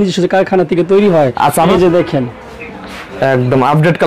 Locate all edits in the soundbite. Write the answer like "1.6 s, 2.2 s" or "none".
1.7 s